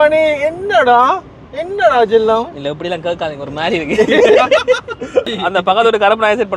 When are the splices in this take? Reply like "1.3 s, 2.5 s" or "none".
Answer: 5.4 s